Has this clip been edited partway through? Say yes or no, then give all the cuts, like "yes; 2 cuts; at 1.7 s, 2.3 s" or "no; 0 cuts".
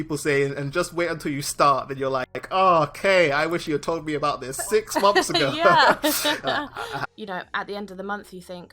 yes; 1 cut; at 7.0 s